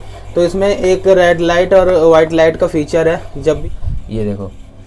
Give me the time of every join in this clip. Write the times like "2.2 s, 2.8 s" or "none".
3.6 s